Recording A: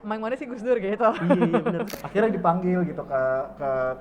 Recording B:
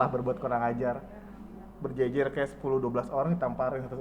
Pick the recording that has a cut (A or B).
A